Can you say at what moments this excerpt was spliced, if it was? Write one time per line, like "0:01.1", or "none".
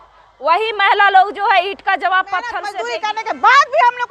0:02.6